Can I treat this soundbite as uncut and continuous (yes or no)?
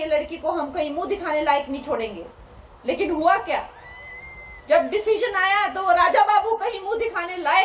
yes